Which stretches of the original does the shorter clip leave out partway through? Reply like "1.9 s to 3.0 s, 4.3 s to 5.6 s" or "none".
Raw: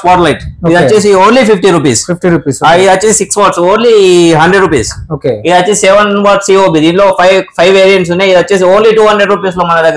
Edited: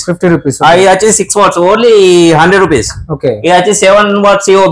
none